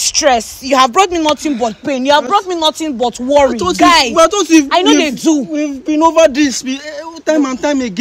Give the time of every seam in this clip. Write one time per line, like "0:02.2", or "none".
none